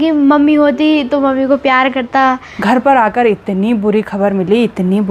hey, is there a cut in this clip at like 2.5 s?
yes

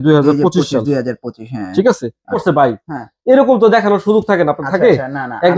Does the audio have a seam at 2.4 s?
yes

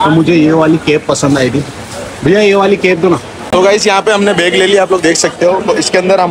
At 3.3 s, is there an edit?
yes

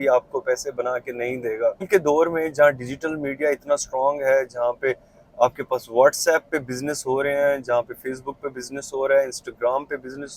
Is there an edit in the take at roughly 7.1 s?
no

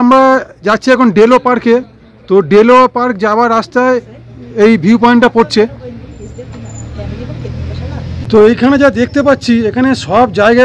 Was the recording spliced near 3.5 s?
no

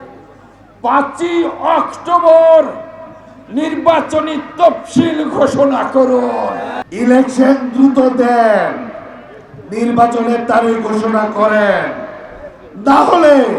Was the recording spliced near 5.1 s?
no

